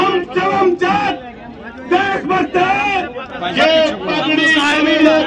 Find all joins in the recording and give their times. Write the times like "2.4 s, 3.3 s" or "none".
3.4 s